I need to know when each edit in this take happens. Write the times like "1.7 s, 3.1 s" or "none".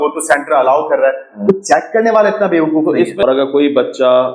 3.2 s